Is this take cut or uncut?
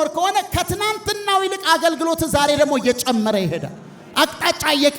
uncut